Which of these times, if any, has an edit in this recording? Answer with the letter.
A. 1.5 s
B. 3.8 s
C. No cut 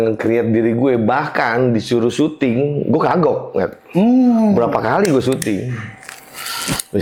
C